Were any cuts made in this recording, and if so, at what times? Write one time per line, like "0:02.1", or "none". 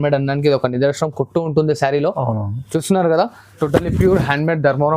0:03.6